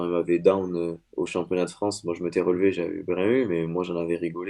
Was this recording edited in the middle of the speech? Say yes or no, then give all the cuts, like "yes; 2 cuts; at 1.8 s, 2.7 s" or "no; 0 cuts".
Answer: yes; 1 cut; at 1.0 s